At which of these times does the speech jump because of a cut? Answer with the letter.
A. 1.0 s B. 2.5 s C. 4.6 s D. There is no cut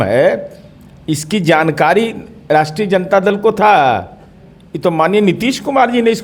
D